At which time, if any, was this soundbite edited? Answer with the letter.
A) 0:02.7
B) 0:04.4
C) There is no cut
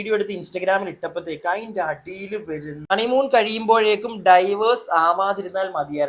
A